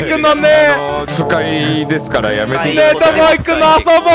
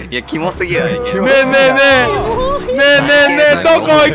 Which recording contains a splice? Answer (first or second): first